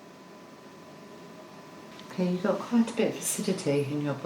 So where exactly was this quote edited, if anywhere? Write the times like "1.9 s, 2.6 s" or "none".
1.9 s